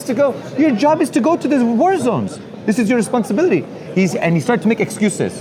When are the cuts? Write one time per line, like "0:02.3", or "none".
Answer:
none